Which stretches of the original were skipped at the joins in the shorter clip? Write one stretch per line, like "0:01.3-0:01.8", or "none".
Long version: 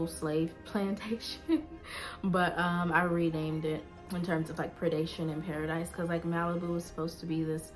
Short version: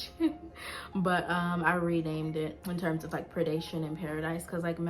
0:03.9-0:04.0